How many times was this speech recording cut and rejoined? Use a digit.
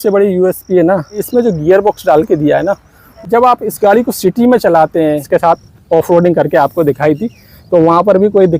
3